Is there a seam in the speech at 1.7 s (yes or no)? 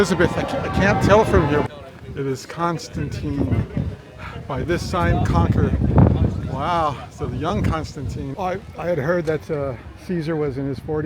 yes